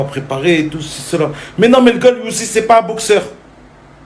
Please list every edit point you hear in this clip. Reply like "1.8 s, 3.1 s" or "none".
2.0 s